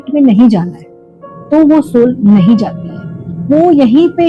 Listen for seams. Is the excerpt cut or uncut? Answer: uncut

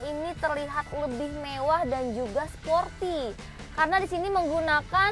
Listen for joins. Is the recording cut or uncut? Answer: uncut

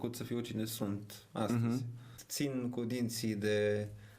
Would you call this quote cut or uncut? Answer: cut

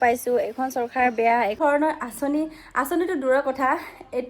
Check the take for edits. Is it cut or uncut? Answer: cut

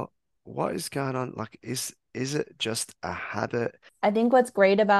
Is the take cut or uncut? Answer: cut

